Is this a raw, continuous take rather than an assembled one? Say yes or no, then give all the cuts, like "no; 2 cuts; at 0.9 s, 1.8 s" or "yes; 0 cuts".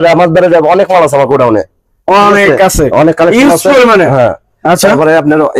yes; 0 cuts